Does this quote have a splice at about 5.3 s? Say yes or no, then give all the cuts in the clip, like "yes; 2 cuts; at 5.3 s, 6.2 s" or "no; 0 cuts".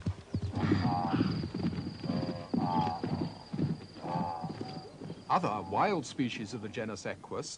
no; 0 cuts